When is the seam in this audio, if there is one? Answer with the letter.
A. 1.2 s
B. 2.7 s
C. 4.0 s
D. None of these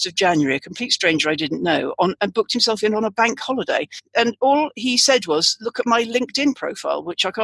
C